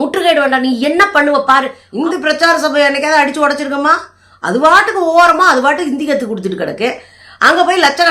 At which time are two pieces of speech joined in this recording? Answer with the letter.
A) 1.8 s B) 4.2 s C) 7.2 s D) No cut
A